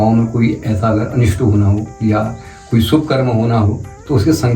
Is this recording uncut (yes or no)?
yes